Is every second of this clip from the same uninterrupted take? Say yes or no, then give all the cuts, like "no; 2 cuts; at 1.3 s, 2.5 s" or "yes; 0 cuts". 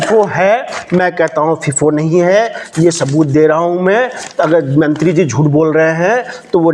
yes; 0 cuts